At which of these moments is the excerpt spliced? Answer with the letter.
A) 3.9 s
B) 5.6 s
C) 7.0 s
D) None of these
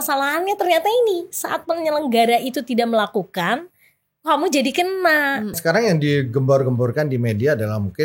B